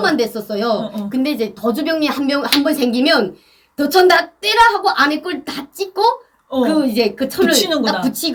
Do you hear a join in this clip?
no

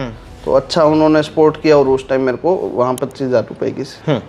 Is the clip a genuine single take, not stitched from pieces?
yes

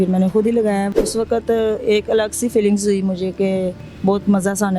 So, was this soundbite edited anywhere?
yes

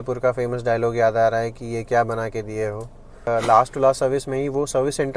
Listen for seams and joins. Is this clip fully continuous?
no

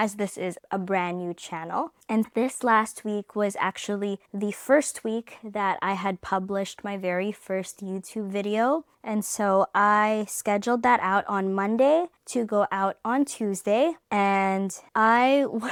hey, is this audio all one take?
yes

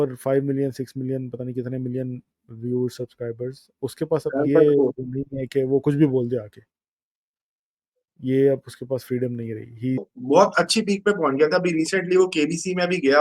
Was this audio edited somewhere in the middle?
yes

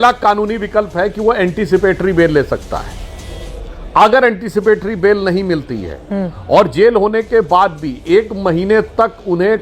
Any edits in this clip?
no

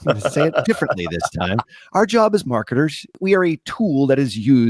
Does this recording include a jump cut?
yes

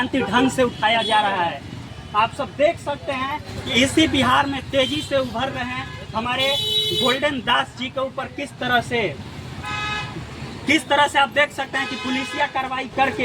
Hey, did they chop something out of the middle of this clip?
yes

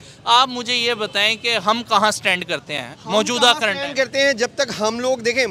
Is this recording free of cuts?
yes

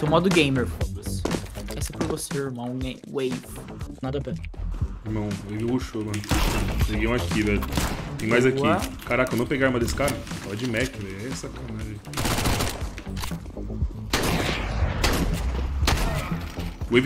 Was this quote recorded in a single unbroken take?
yes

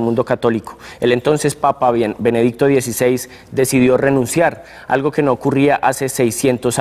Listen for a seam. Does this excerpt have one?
yes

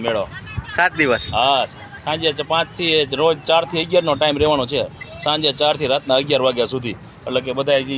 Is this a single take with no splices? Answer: yes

